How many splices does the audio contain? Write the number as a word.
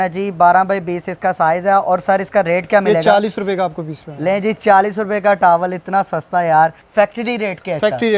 one